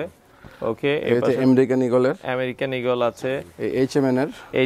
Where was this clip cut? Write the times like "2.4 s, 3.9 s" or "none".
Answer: none